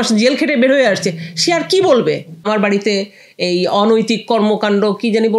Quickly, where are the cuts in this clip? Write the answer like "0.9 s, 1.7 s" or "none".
2.4 s